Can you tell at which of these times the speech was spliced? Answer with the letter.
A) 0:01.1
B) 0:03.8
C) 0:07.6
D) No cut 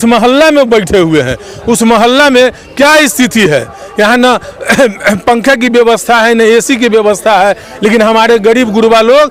D